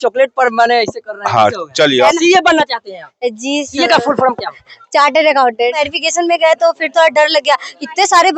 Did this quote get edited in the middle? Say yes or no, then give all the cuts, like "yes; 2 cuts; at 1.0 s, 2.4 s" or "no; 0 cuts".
yes; 2 cuts; at 2.1 s, 5.9 s